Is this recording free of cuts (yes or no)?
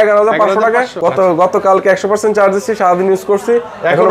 no